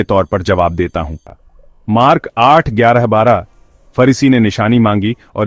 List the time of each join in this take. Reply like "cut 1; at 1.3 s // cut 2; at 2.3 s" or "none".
cut 1; at 1.2 s